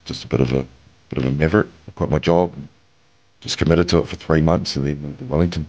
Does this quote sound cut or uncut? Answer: cut